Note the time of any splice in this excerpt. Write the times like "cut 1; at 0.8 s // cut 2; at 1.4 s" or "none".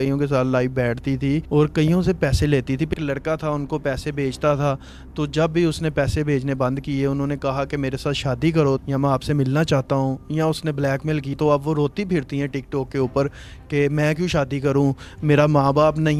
none